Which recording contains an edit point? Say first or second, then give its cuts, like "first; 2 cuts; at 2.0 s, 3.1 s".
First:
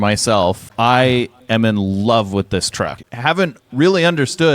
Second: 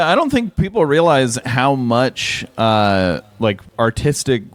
first; 1 cut; at 3.0 s